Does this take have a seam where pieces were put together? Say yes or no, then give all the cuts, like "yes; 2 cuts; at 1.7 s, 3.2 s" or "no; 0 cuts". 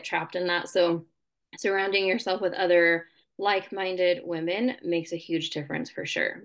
no; 0 cuts